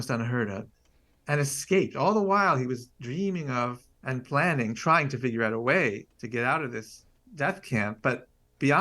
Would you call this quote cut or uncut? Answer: cut